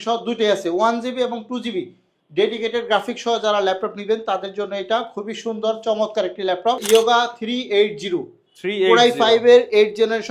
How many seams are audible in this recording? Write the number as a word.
one